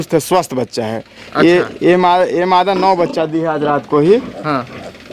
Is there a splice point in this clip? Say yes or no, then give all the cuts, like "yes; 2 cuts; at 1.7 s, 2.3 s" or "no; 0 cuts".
no; 0 cuts